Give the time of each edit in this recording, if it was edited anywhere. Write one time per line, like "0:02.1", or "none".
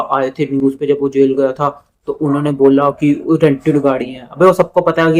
none